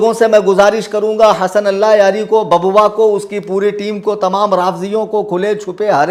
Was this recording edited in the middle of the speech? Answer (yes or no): no